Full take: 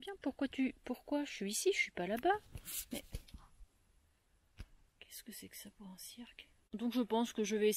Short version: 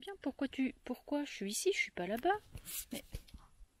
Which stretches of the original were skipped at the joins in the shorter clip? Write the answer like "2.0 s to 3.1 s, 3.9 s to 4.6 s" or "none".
none